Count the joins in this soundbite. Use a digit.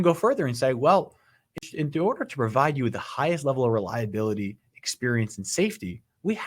1